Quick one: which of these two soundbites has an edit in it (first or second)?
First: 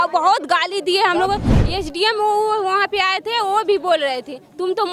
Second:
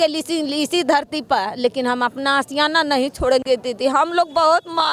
first